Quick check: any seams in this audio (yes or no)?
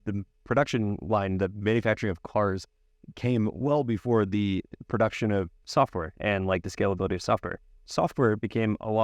yes